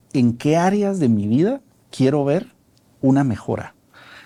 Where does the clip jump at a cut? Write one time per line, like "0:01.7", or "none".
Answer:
none